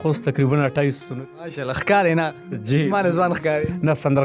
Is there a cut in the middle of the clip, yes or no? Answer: yes